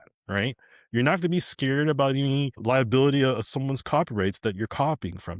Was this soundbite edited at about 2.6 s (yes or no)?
yes